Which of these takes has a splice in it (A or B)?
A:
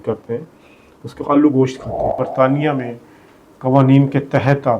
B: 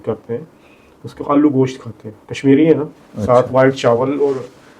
A